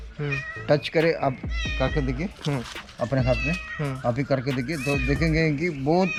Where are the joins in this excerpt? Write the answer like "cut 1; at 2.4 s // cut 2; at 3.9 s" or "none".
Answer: none